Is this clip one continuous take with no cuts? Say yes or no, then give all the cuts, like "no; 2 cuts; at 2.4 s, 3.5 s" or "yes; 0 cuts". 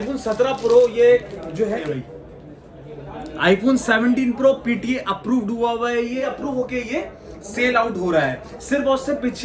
no; 2 cuts; at 1.8 s, 6.2 s